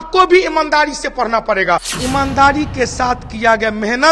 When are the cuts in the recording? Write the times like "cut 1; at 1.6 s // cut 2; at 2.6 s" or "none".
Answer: cut 1; at 1.9 s